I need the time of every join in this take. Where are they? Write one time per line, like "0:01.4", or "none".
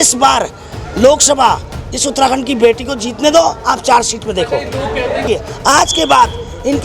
0:05.2